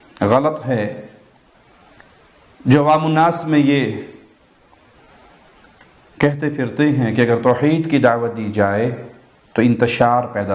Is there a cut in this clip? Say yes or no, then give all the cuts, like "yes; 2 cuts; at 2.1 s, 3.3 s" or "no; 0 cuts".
no; 0 cuts